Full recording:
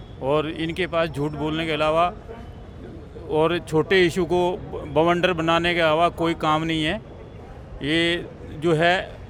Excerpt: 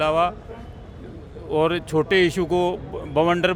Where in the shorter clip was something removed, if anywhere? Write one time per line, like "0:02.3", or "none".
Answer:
none